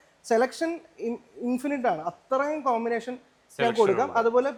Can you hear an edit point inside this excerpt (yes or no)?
no